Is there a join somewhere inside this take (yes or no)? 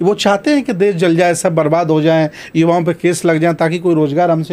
no